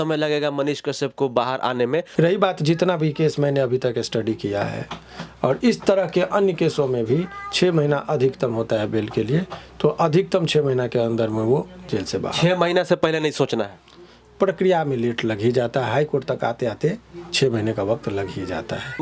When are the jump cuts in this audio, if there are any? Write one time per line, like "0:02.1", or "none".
none